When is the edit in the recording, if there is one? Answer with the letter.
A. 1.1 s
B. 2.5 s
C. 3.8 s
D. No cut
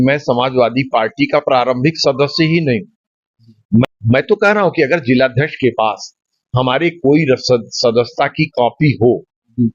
C